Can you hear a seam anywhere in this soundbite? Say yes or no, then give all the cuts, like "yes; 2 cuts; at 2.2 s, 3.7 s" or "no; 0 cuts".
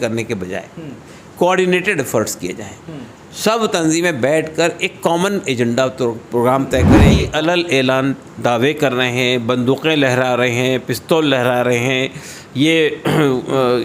yes; 1 cut; at 7.2 s